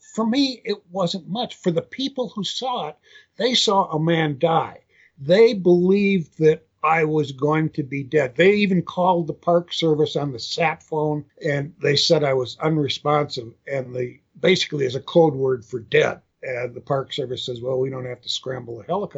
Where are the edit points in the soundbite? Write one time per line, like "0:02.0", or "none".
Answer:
0:06.7
0:11.3
0:14.2
0:16.3